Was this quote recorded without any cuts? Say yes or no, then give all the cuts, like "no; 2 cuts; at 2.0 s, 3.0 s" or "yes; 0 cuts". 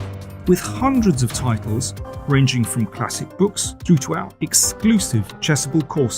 no; 2 cuts; at 3.7 s, 5.3 s